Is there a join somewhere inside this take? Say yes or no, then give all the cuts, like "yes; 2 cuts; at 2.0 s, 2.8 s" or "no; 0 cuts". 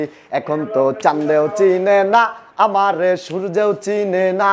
no; 0 cuts